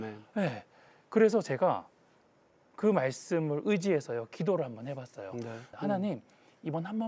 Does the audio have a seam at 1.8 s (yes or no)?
no